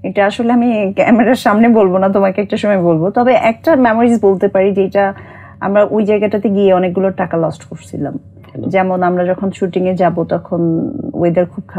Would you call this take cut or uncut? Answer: uncut